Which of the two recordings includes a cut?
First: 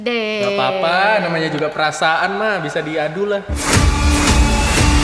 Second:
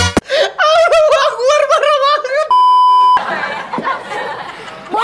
second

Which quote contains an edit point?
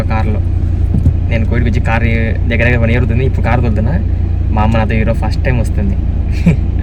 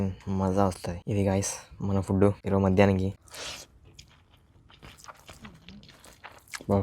second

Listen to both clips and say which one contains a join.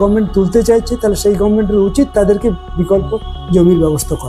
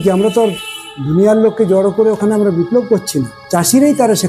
second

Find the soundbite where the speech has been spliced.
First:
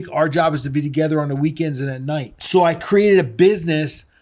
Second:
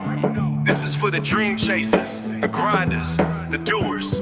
first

